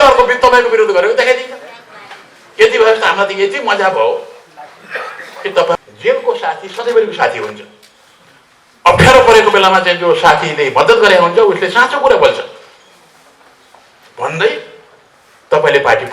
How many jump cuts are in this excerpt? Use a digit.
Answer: 1